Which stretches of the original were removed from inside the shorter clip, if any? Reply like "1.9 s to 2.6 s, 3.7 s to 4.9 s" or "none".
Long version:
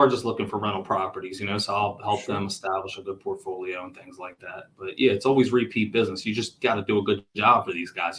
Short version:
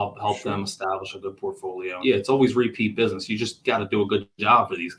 3.8 s to 4.9 s